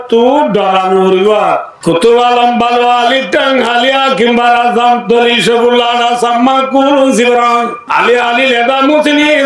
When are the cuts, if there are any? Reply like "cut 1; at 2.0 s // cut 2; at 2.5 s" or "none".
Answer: cut 1; at 1.7 s // cut 2; at 7.8 s